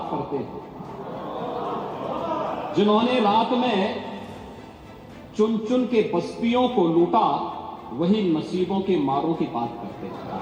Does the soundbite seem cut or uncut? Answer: uncut